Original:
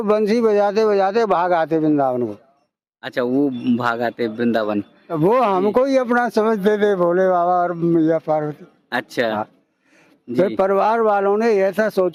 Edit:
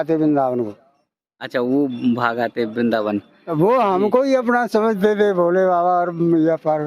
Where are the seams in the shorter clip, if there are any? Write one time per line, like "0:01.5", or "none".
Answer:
none